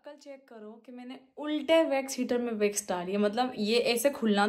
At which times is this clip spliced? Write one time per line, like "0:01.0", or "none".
none